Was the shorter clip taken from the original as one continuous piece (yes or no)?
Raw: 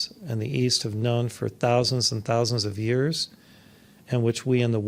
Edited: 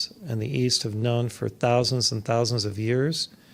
yes